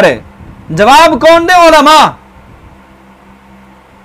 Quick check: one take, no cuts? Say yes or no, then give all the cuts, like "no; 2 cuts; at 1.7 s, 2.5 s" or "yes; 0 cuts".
yes; 0 cuts